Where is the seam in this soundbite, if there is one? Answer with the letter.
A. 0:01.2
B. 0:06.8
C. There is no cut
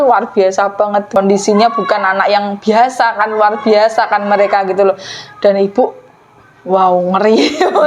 A